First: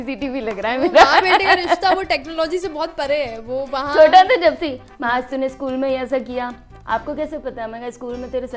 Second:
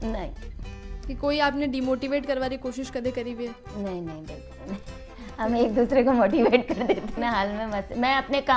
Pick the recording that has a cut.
second; 1 cut; at 7.1 s

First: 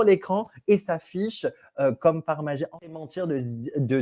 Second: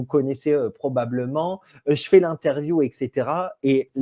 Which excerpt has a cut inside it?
first; 1 cut; at 2.9 s

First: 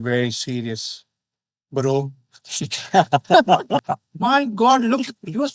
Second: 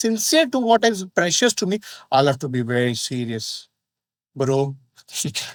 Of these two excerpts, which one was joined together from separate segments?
first; 1 cut; at 3.8 s

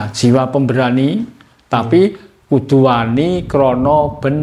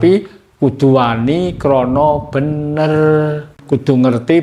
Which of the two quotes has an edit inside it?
second; 1 cut; at 3.5 s

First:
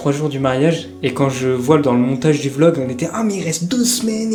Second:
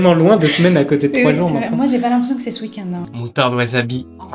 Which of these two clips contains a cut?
second; 1 cut; at 3.0 s

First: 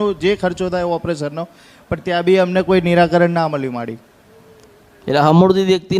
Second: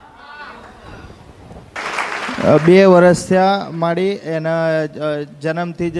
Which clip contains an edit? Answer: second; 1 cut; at 1.8 s

